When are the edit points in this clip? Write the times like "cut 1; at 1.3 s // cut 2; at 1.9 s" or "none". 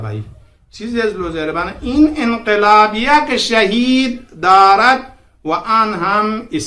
none